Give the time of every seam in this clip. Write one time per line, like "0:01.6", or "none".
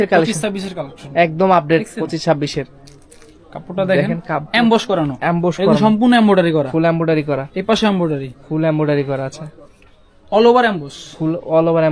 none